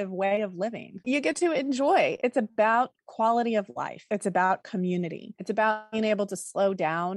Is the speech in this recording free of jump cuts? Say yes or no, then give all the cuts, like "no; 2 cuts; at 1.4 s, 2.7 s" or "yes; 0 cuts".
no; 1 cut; at 1.0 s